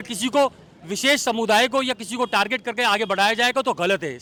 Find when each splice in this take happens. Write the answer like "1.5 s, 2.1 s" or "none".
none